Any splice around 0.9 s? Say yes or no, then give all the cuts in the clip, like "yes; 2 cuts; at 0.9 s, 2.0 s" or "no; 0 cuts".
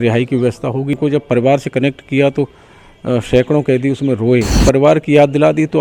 yes; 2 cuts; at 0.9 s, 4.6 s